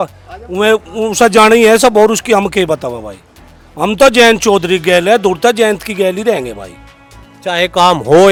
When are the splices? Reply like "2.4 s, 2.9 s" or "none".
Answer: none